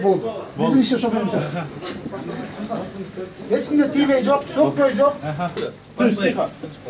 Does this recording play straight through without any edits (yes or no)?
no